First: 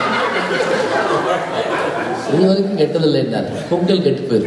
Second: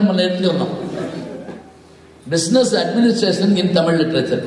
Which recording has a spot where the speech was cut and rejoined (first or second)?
second